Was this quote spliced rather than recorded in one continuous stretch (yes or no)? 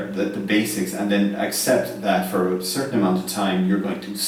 no